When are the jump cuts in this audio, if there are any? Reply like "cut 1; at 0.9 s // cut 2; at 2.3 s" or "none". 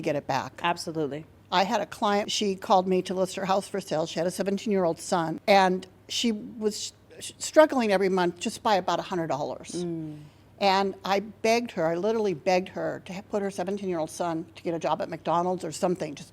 cut 1; at 2.3 s // cut 2; at 5.4 s